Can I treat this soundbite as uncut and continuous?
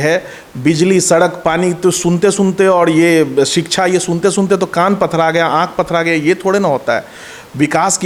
yes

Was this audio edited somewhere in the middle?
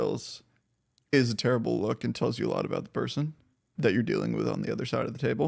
yes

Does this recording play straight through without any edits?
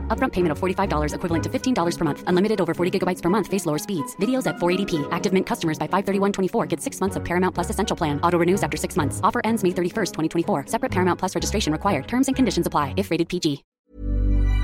no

